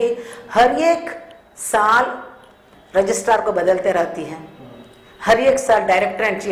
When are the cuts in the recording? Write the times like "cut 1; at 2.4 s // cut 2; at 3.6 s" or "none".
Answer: none